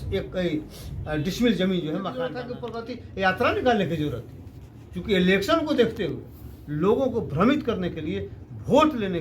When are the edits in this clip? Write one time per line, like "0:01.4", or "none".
0:02.4